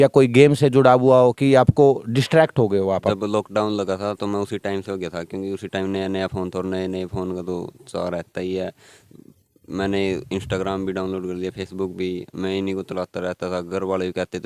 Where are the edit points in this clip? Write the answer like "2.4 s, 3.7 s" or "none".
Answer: 3.1 s